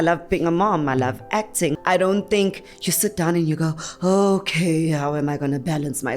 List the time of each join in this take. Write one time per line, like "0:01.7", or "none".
0:01.8